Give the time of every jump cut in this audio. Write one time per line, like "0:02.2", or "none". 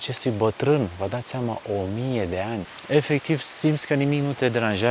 0:02.7